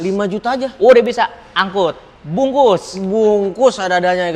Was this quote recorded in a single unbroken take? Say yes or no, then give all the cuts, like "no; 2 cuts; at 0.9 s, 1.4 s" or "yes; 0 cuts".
yes; 0 cuts